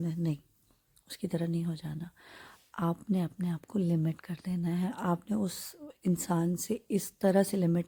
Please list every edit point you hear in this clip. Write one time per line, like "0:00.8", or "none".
none

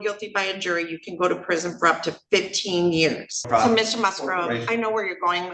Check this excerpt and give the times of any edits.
0:03.5

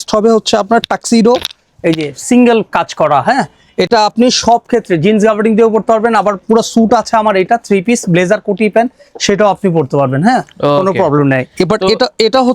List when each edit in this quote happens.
none

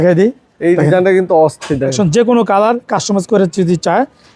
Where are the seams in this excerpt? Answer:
0:01.9

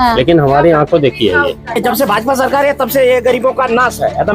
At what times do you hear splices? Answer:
0:01.8

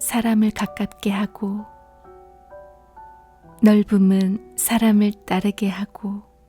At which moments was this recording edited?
0:01.6
0:03.6

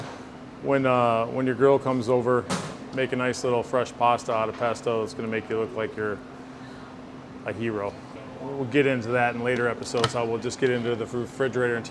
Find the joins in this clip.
0:08.1

